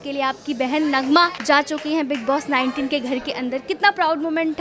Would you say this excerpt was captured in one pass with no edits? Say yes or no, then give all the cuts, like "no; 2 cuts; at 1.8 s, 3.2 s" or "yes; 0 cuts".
no; 1 cut; at 1.4 s